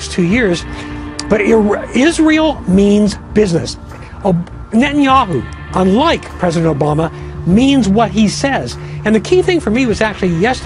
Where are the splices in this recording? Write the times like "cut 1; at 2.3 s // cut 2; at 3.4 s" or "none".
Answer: none